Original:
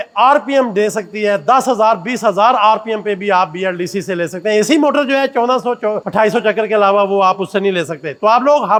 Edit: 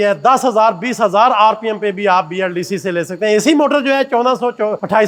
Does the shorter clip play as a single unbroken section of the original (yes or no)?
yes